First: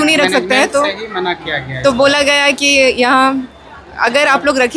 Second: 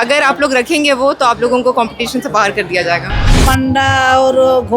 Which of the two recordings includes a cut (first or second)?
second